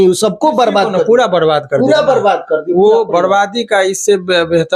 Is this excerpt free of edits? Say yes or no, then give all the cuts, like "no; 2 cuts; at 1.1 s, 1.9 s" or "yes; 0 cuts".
yes; 0 cuts